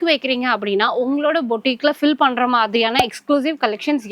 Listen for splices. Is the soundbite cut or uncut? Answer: uncut